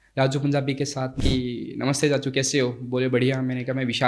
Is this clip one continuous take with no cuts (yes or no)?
no